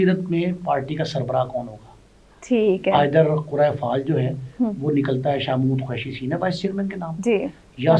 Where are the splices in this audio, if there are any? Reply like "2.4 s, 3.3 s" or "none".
none